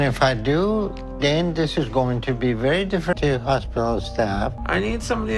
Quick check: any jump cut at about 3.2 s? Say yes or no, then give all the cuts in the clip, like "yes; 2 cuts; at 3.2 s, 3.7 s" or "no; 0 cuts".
yes; 1 cut; at 3.2 s